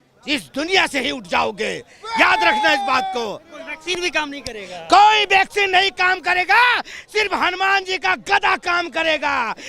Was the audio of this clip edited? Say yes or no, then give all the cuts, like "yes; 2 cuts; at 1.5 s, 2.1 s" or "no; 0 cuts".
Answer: no; 0 cuts